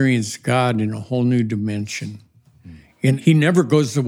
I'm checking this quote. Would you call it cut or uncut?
cut